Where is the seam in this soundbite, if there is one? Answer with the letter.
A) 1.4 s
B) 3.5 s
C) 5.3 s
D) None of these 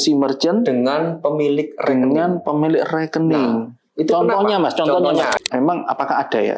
C